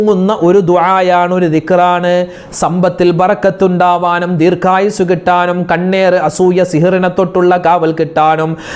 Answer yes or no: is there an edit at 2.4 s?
yes